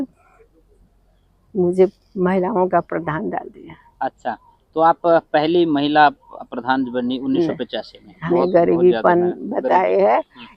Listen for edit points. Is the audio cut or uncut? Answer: cut